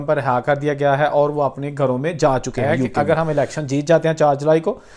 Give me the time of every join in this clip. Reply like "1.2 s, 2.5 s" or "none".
2.7 s